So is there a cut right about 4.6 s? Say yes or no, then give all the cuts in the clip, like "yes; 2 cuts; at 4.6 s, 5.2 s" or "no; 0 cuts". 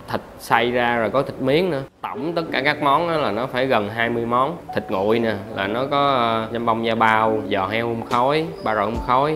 yes; 5 cuts; at 1.9 s, 4.6 s, 6.5 s, 7.4 s, 8.6 s